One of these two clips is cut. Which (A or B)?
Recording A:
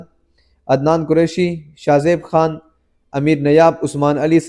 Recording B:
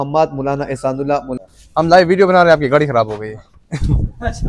B